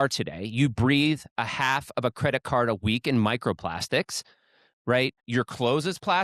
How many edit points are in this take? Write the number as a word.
zero